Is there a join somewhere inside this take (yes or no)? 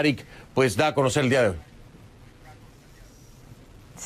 yes